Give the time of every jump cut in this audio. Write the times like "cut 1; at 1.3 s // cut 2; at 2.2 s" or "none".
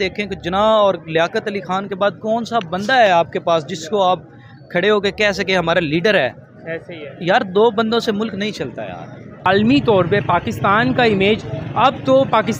cut 1; at 9.5 s